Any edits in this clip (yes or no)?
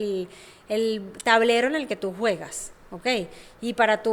no